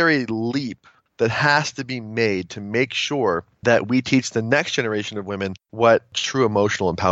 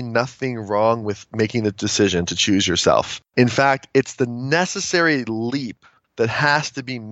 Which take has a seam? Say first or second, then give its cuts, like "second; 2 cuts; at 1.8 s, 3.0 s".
first; 1 cut; at 6.2 s